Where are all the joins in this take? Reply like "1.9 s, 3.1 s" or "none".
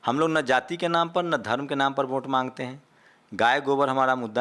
none